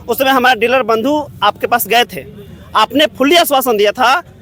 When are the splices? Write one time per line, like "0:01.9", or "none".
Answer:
none